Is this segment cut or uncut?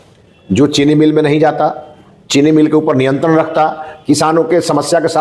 uncut